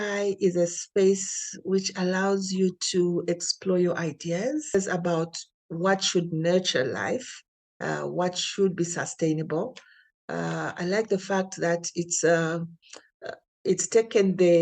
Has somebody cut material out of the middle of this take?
yes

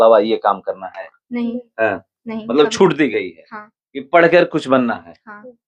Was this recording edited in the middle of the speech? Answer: no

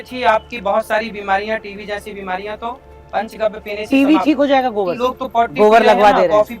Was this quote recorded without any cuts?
no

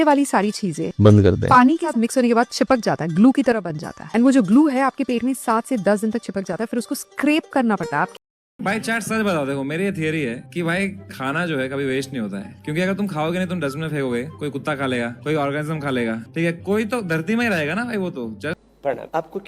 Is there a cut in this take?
yes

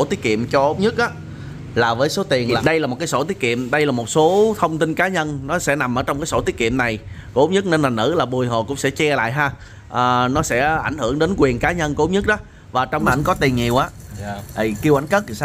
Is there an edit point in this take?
yes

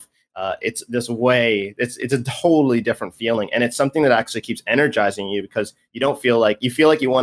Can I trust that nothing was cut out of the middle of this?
yes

